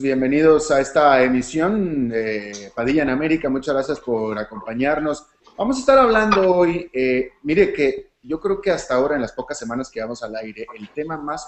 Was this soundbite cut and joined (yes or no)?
no